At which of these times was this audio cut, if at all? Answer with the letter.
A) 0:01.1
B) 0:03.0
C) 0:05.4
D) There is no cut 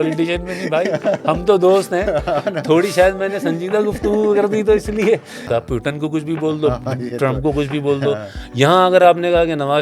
C